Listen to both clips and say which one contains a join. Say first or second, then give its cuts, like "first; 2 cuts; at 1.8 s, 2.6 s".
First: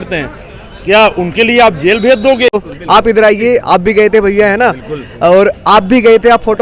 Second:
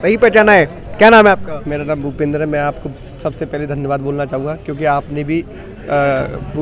first; 1 cut; at 2.6 s